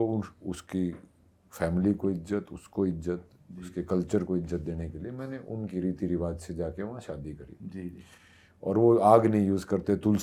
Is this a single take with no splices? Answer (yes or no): yes